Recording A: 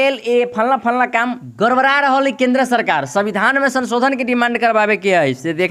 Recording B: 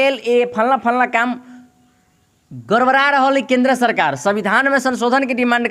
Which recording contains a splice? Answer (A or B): A